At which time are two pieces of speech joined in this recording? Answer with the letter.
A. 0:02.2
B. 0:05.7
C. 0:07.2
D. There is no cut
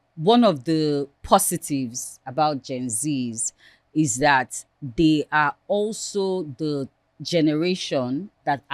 D